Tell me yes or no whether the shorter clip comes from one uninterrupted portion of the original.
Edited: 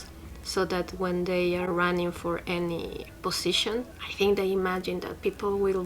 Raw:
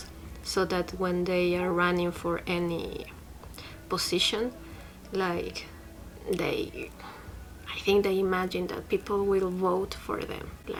no